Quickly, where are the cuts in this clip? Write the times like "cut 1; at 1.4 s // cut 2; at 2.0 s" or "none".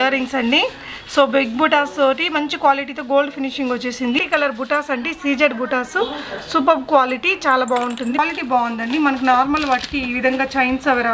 cut 1; at 4.2 s // cut 2; at 8.2 s